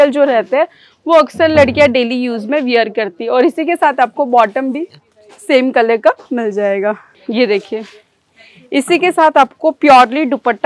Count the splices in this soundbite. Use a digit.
0